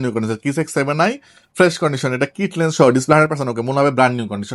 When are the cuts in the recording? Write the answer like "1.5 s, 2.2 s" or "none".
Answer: none